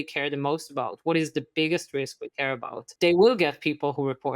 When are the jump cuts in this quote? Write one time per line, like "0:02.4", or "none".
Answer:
0:02.9